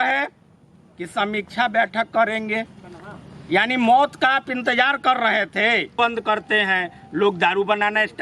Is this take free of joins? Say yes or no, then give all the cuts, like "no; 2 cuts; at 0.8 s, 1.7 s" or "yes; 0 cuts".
no; 1 cut; at 5.9 s